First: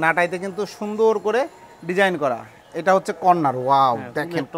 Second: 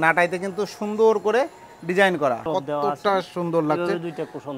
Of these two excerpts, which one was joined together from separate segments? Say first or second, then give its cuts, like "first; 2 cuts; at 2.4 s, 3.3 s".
second; 1 cut; at 2.4 s